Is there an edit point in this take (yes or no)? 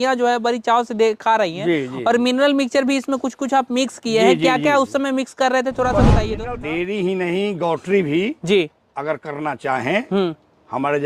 yes